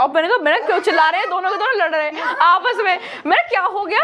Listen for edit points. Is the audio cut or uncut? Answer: uncut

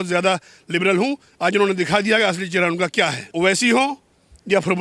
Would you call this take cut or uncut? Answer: cut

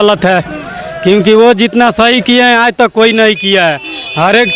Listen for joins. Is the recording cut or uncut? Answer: uncut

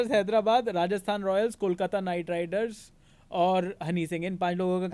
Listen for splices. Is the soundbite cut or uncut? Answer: uncut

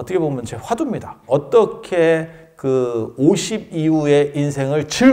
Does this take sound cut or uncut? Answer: uncut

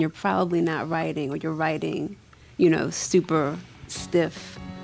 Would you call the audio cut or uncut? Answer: uncut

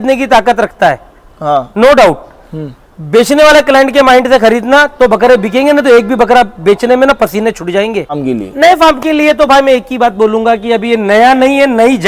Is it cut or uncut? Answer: cut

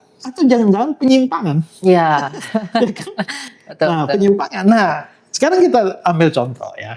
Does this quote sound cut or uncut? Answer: uncut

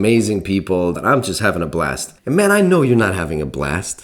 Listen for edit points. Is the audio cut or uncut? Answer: cut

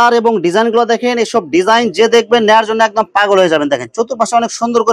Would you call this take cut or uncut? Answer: uncut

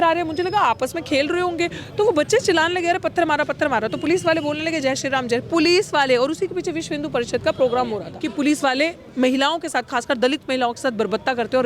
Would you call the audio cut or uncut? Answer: cut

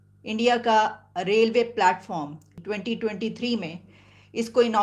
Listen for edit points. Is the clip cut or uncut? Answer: cut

